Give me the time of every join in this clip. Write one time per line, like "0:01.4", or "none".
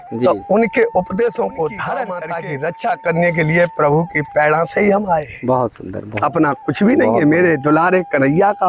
0:02.2